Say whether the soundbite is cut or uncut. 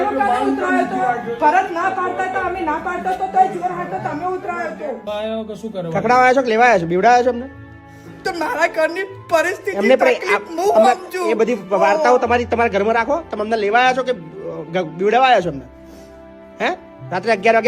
cut